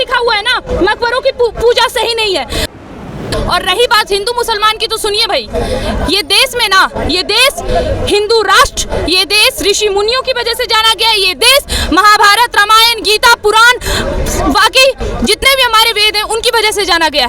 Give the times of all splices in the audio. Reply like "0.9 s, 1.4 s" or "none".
2.9 s